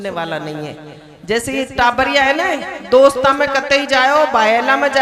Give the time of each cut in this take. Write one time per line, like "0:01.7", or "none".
none

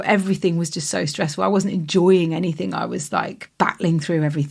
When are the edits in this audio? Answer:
0:03.4

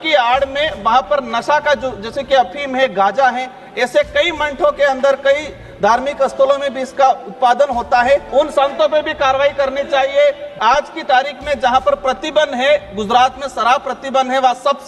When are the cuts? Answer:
0:08.3
0:10.5

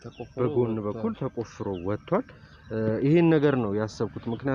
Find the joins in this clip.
none

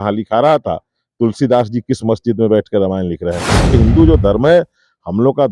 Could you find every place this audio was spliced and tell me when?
0:03.7

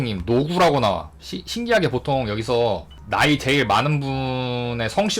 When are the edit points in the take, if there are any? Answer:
0:02.9

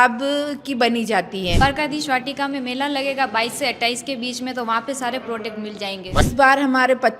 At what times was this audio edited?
0:01.6
0:06.2

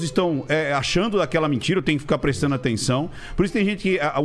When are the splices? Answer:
none

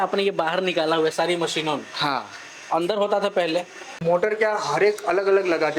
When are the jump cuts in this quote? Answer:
0:04.0

